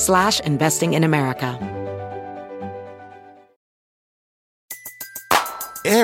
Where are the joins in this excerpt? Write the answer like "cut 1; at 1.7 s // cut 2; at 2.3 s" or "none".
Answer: cut 1; at 1.5 s